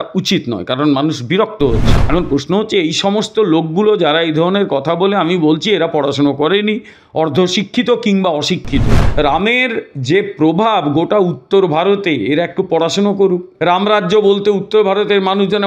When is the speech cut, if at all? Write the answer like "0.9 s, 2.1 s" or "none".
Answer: 2.0 s, 9.0 s, 13.5 s

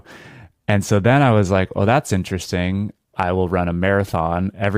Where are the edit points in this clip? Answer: 3.1 s

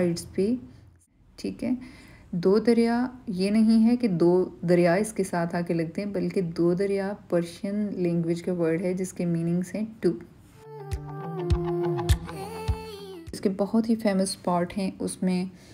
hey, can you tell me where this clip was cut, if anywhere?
1.0 s

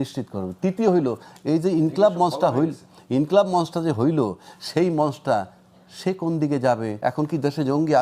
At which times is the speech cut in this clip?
7.0 s

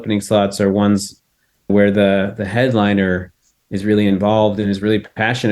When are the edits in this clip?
1.7 s

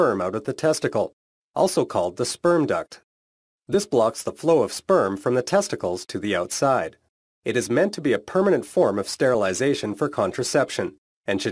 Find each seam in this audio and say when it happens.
4.9 s

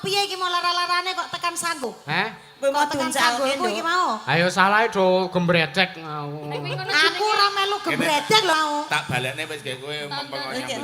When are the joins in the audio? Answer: 1.8 s, 8.5 s

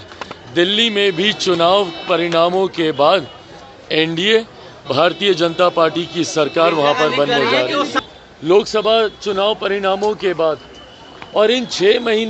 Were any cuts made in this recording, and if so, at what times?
8.0 s

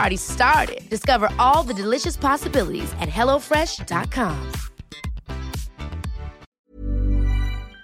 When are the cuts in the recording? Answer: 6.5 s

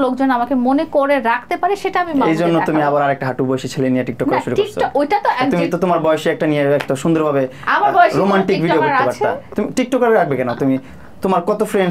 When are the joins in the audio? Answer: none

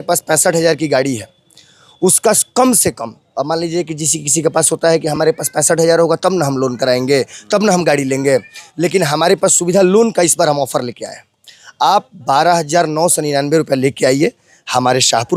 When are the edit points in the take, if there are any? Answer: none

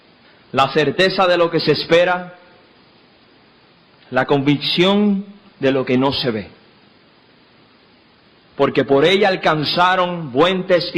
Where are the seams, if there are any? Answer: 9.4 s

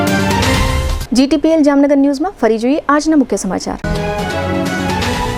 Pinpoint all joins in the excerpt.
none

